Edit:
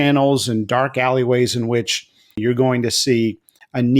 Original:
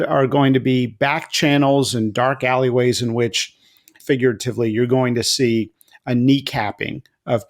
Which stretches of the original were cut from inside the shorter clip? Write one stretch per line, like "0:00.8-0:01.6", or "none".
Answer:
0:03.9-0:04.7

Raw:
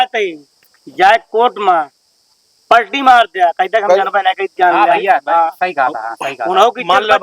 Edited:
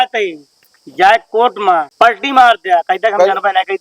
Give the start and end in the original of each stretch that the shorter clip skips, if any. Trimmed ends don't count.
0:01.9-0:02.6

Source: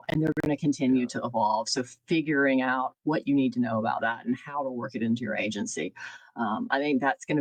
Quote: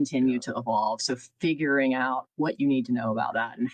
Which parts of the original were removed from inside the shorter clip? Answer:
none

